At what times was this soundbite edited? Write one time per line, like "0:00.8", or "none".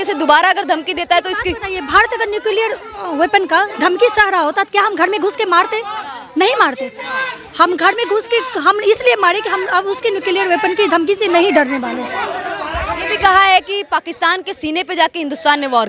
none